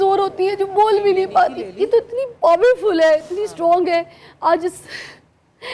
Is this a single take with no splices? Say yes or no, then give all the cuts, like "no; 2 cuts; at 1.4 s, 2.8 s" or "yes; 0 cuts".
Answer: yes; 0 cuts